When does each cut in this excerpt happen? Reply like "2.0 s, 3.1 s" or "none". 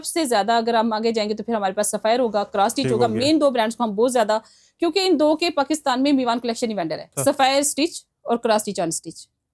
7.1 s